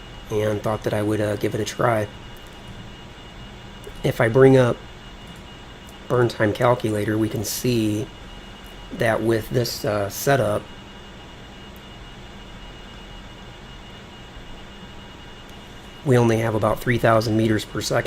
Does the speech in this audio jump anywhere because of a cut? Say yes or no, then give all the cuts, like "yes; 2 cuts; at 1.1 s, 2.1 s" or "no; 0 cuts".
no; 0 cuts